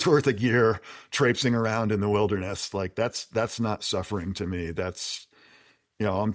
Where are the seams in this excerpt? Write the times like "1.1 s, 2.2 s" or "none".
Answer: none